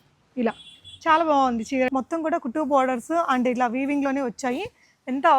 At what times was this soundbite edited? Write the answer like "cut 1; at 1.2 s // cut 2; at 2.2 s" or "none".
cut 1; at 1.9 s